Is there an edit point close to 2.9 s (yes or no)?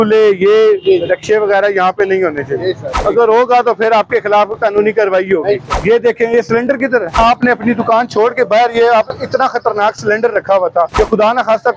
yes